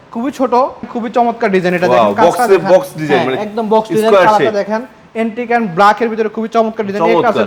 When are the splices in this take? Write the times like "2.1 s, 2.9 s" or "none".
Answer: 0.9 s